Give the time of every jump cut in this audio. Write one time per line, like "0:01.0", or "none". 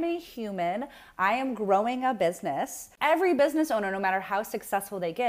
0:02.8

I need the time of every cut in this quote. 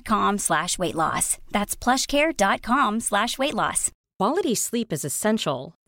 0:04.0

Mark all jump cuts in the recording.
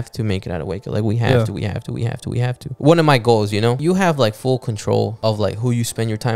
0:02.6
0:03.8
0:05.1

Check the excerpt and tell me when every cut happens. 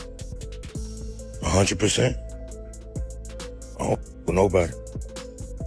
none

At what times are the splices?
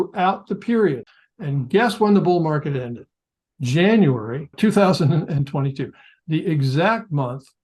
0:01.1

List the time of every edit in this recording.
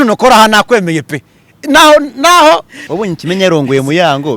0:02.8

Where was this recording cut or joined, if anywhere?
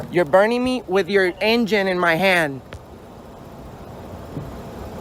none

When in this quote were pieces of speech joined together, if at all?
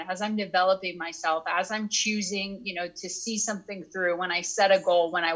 none

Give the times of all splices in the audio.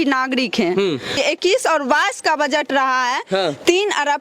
0:01.2

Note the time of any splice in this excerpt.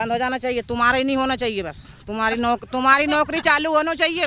none

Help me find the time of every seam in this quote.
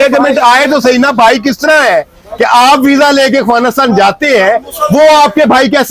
none

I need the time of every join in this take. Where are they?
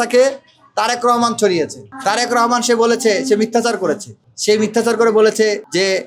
none

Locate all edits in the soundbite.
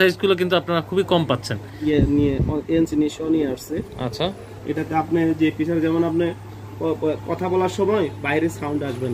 0:01.8

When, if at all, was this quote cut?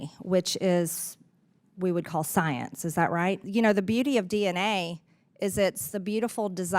0:03.4

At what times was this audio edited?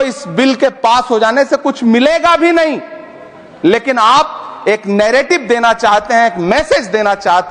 none

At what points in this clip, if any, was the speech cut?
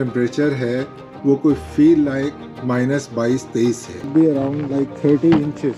0:04.1

